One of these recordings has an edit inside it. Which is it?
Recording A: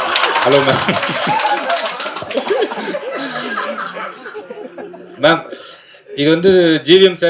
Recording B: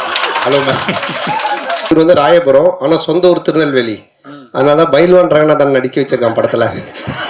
B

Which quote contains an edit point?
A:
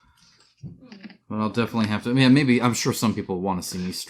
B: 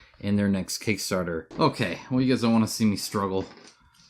B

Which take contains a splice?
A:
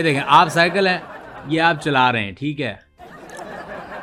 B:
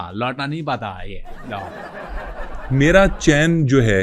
B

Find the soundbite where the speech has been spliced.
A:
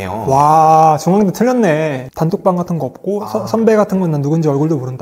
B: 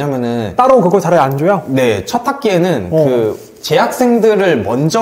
A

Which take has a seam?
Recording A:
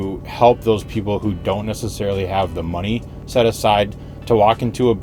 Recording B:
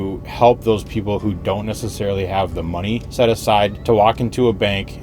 B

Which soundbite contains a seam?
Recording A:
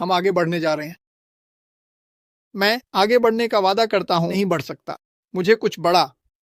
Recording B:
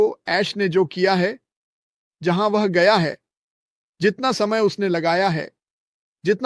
A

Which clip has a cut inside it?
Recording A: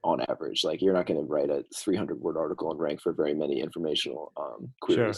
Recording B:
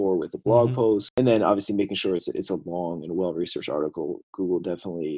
B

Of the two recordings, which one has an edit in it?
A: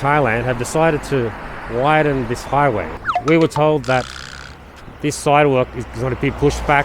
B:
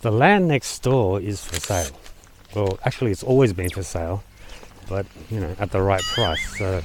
A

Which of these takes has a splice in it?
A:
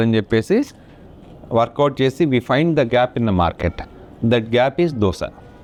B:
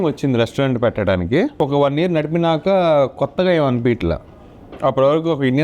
B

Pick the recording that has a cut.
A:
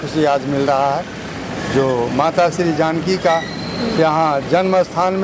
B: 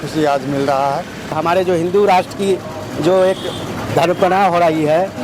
B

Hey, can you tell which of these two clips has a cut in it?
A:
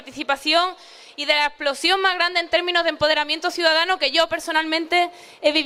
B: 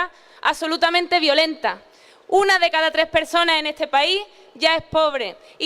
B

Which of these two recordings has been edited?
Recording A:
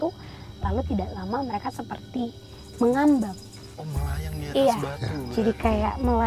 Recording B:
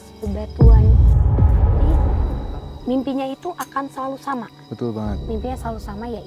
B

